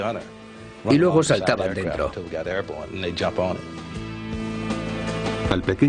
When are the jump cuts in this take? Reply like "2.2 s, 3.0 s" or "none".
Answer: none